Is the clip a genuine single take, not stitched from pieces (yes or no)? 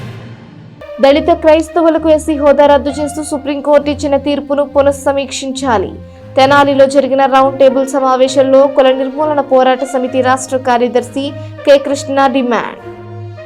yes